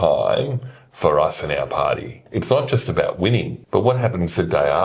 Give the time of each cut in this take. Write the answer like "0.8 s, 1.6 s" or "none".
2.2 s, 3.6 s

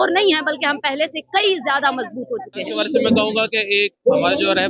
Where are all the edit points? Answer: none

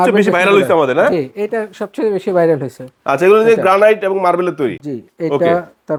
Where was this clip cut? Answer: none

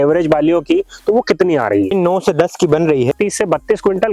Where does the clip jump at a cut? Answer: 3.1 s

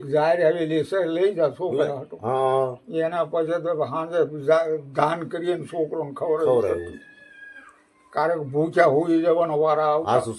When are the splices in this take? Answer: none

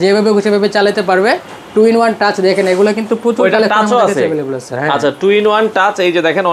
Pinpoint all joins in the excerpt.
none

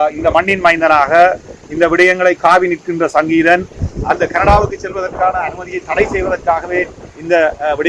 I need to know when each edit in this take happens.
3.9 s

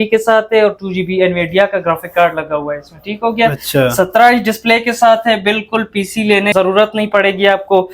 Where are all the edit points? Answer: 6.5 s

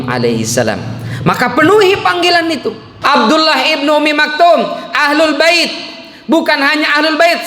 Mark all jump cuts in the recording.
2.9 s

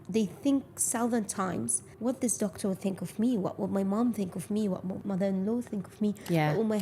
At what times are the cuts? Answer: 1.8 s, 5.0 s

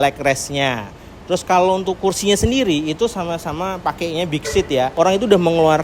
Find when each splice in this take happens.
4.9 s

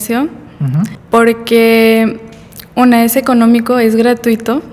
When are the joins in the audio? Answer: 1.0 s

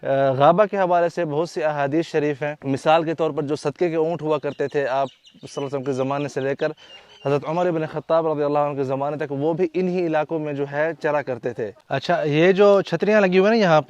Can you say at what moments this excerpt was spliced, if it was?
2.6 s, 11.8 s

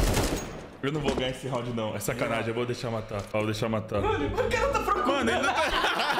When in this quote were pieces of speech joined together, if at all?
none

